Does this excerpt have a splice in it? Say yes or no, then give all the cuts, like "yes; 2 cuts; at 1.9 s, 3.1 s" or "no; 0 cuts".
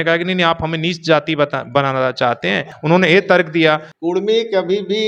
yes; 2 cuts; at 2.7 s, 3.9 s